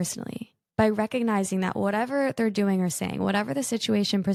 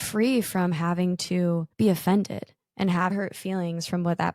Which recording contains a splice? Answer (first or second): second